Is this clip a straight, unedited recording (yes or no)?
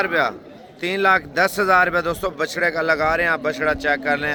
yes